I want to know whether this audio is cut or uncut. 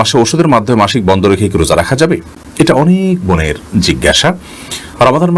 uncut